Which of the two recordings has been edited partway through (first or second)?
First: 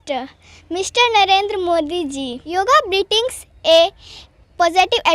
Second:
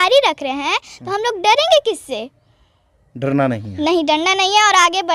first